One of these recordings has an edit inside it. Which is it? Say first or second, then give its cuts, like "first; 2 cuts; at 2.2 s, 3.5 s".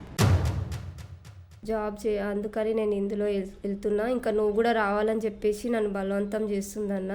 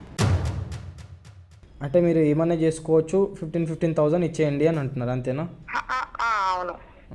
first; 1 cut; at 1.5 s